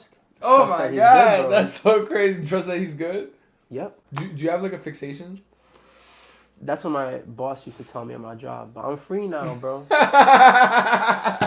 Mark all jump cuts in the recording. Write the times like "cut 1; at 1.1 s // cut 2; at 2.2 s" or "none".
cut 1; at 4.0 s